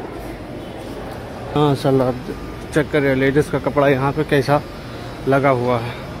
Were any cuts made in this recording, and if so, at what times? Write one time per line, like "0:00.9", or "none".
0:01.5